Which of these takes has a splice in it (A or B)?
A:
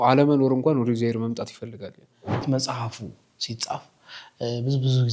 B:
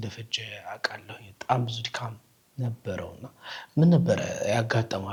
A